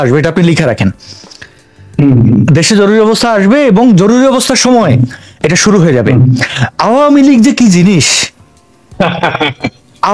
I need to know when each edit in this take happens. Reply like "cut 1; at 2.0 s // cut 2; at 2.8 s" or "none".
none